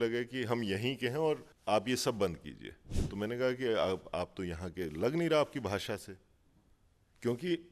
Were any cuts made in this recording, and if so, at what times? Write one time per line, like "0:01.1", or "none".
0:01.5